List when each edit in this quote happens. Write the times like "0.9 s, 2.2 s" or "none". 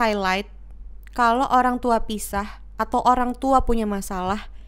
none